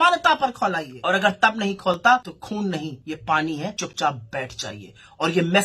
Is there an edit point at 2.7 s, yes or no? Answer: yes